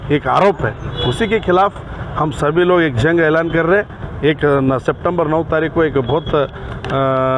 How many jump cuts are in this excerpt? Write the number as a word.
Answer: one